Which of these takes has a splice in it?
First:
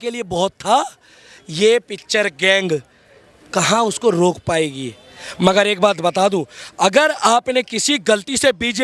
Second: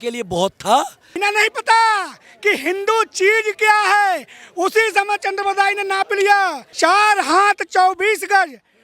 second; 2 cuts; at 1.1 s, 6.6 s

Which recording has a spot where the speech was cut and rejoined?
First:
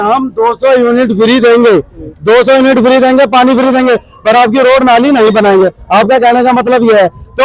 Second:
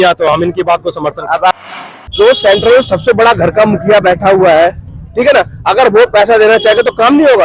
second; 1 cut; at 1.5 s

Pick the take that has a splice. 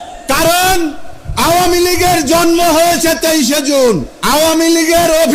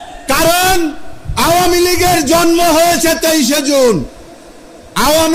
first; 1 cut; at 4.1 s

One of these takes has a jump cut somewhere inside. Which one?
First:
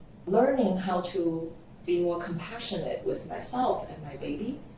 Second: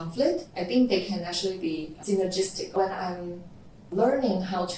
second; 1 cut; at 2.6 s

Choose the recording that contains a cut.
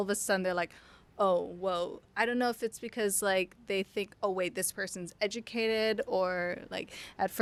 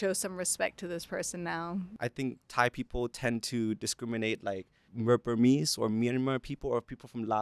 second; 2 cuts; at 1.9 s, 4.8 s

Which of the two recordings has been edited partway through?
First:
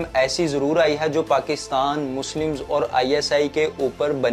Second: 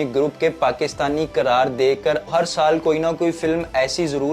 second; 1 cut; at 2.3 s

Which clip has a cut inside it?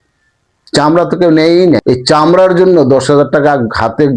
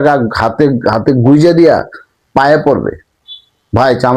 first; 1 cut; at 1.8 s

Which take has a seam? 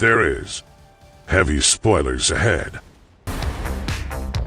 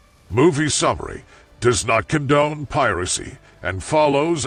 first; 1 cut; at 3.3 s

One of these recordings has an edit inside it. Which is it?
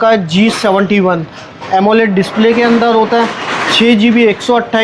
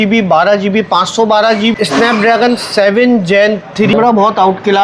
second; 2 cuts; at 1.7 s, 3.9 s

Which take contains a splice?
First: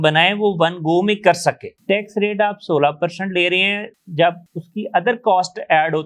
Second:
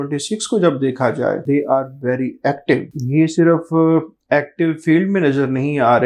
first; 1 cut; at 4.0 s

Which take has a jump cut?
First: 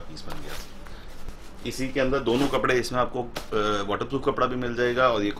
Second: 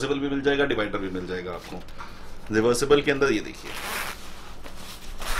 first; 1 cut; at 1.2 s

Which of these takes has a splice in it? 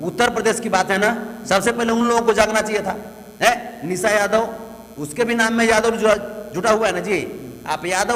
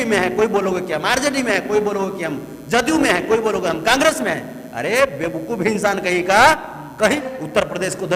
second; 1 cut; at 7.2 s

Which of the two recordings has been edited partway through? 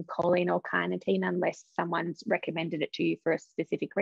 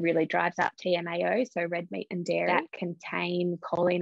second; 1 cut; at 2.5 s

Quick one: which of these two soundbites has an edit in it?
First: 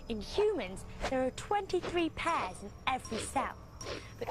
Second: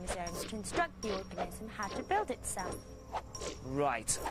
second; 1 cut; at 2.4 s

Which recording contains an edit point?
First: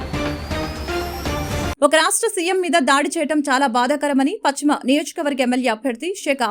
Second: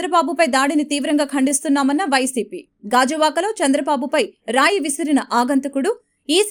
first; 1 cut; at 1.7 s

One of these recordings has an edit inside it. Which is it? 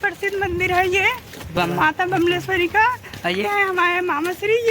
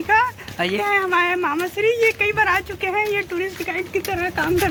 first; 1 cut; at 1.5 s

